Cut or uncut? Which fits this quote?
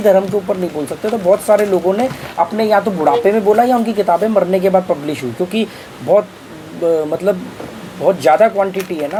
uncut